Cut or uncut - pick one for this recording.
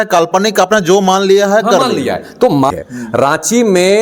cut